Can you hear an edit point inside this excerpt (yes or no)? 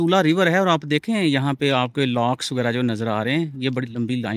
no